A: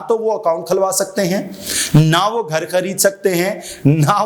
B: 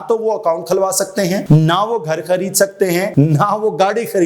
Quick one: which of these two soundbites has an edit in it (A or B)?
B